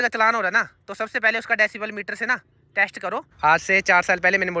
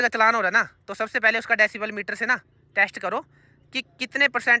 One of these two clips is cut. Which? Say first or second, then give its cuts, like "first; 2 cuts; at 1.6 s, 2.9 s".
first; 1 cut; at 3.3 s